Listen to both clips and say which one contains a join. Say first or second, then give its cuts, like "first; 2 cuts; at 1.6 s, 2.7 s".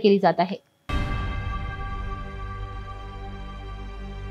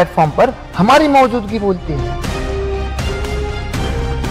first; 1 cut; at 1.6 s